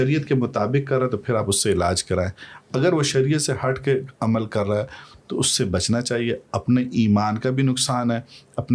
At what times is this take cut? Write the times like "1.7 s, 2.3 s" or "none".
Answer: none